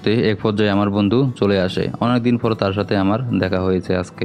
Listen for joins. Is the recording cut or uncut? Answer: uncut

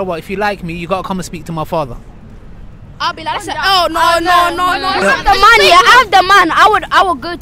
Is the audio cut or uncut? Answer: cut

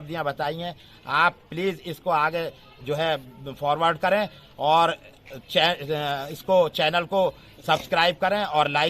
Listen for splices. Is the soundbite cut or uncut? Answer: uncut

